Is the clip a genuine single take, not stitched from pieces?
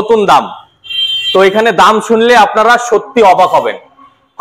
yes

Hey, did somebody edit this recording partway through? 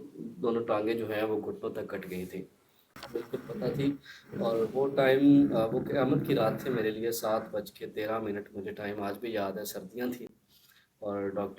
yes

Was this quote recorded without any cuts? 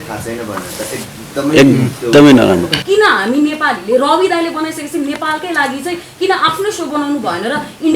no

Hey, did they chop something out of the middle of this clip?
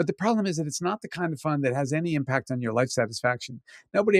no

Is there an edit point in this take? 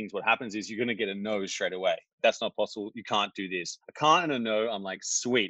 yes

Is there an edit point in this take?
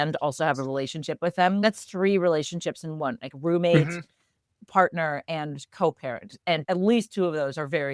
yes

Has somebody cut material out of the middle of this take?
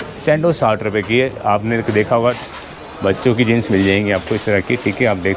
yes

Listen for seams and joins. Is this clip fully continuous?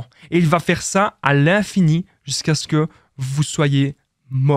yes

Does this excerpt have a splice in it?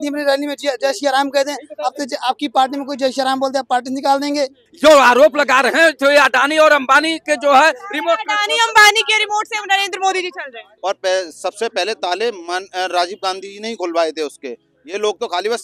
yes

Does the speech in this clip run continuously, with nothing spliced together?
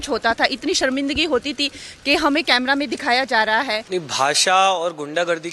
no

